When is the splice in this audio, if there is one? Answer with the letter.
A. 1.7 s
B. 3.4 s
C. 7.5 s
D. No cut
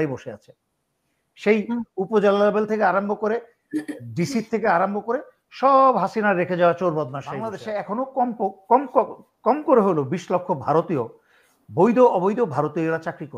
C